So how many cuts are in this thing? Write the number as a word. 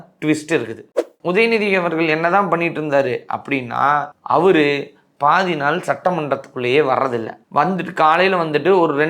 one